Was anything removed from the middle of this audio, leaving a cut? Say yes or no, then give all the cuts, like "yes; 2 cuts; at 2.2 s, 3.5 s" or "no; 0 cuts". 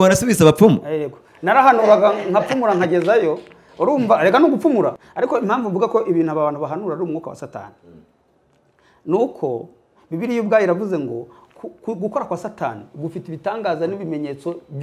yes; 1 cut; at 5.0 s